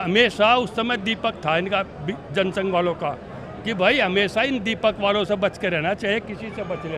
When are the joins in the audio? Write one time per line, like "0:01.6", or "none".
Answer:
none